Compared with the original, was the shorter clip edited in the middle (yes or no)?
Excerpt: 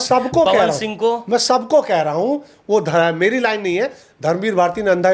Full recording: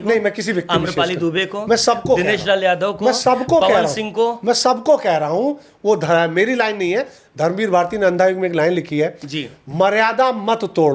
no